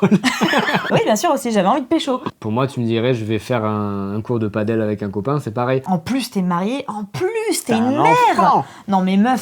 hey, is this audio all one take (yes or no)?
no